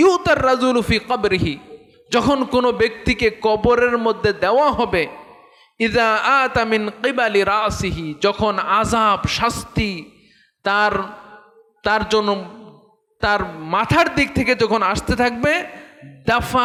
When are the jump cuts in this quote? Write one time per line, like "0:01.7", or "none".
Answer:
none